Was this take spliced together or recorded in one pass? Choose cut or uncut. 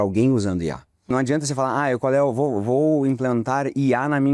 cut